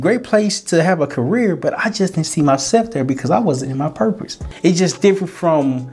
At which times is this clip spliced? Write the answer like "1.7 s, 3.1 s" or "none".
4.4 s